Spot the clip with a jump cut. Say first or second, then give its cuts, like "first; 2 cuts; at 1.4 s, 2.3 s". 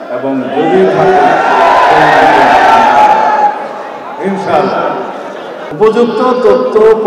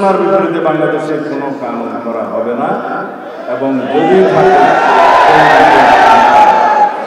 first; 1 cut; at 5.7 s